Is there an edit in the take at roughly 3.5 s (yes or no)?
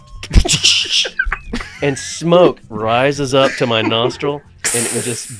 no